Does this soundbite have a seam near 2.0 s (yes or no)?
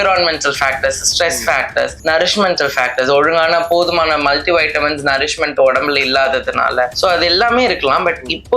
yes